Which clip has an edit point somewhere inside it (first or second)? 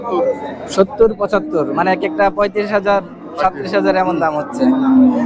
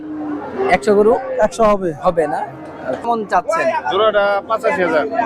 second